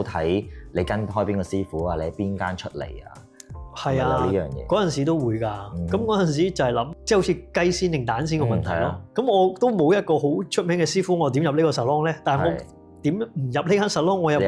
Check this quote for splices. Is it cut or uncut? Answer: cut